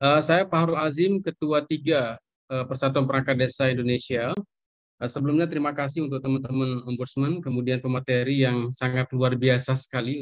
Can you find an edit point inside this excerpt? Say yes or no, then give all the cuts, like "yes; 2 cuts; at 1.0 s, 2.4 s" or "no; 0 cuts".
no; 0 cuts